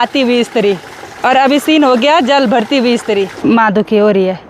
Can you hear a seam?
yes; 1 cut; at 3.3 s

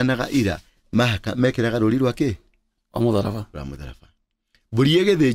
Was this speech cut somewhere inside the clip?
no; 0 cuts

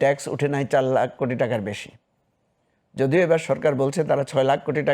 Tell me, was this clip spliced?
no; 0 cuts

